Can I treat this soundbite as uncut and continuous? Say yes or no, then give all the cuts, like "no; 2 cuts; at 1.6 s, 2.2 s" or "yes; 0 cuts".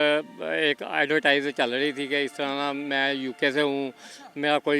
yes; 0 cuts